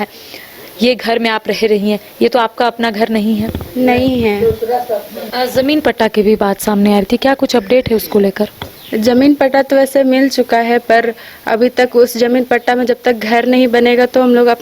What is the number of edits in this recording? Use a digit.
1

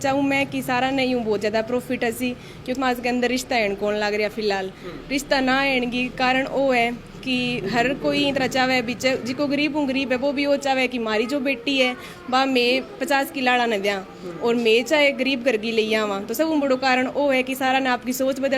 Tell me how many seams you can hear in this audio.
1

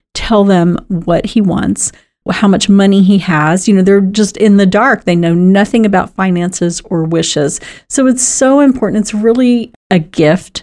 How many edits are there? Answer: 1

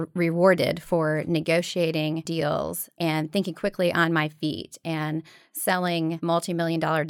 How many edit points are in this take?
2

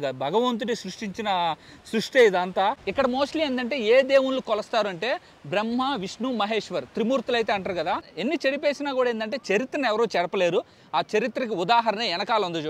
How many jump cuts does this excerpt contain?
2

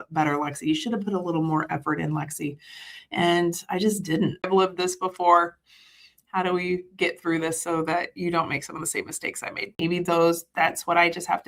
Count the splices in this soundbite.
2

